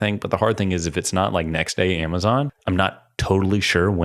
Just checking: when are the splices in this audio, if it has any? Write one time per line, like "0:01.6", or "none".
0:02.6